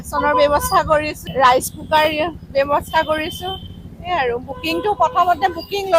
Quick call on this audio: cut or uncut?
uncut